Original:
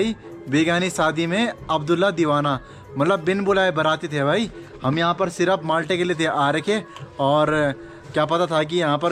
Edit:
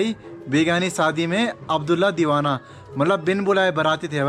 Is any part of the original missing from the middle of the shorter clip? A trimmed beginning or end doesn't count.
no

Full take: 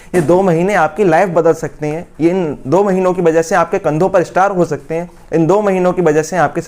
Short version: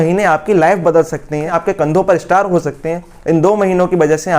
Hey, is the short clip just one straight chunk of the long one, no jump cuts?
no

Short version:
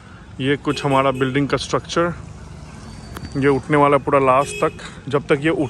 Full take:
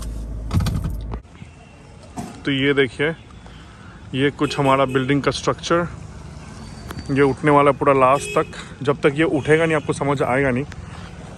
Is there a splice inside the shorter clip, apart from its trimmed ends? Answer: no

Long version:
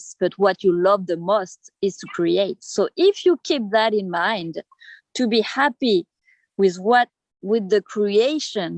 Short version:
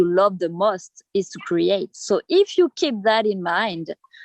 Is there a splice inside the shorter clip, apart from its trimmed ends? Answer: no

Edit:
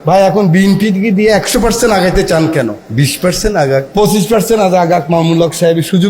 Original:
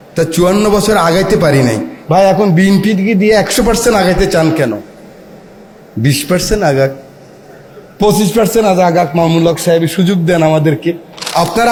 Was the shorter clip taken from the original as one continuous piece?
no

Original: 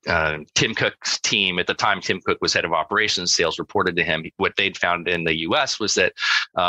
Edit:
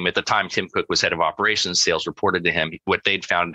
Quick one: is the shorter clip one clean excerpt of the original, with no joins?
yes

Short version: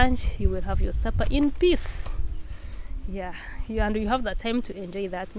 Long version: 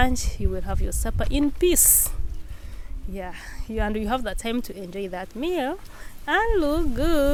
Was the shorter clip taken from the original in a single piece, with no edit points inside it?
yes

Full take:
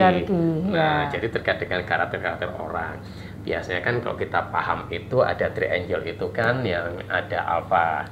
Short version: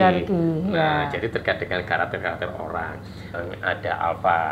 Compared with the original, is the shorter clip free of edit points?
no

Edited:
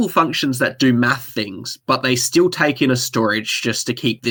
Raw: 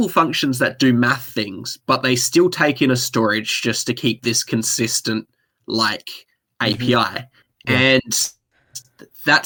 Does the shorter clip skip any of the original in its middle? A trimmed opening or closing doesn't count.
no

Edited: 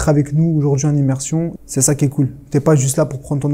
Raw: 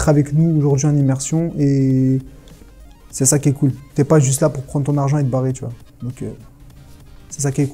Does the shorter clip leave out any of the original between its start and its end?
yes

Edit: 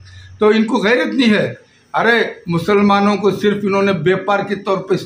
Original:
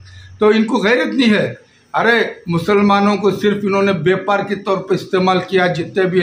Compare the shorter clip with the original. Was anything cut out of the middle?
no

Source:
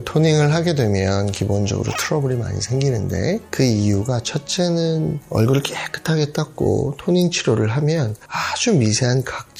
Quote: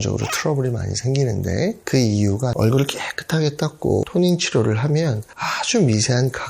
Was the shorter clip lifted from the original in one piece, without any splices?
no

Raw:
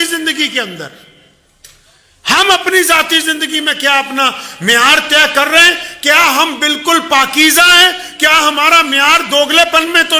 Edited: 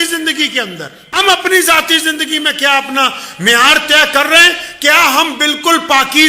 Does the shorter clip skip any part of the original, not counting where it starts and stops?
yes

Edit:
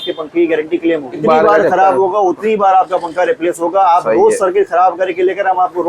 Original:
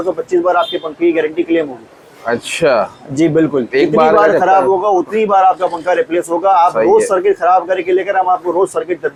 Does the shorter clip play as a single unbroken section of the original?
no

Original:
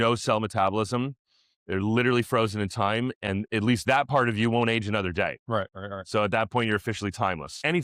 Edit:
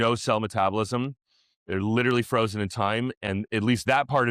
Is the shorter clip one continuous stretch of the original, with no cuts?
yes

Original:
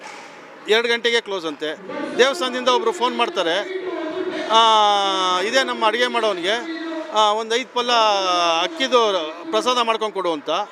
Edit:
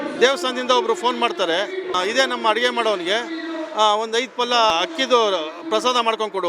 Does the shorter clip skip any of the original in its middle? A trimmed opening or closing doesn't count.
yes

